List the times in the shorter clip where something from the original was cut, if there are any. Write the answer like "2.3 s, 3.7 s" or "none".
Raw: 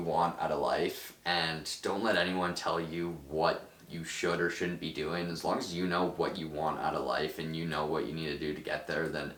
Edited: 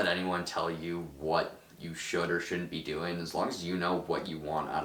none